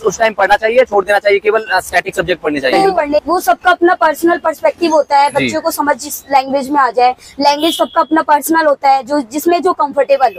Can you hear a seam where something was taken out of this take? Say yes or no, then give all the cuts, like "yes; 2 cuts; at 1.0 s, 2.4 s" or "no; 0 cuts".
yes; 1 cut; at 3.2 s